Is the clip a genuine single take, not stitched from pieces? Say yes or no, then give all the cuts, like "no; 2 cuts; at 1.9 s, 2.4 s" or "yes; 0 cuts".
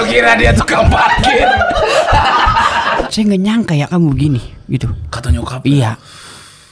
no; 1 cut; at 3.0 s